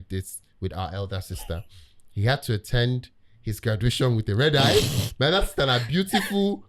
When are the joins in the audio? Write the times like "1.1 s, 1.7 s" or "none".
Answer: none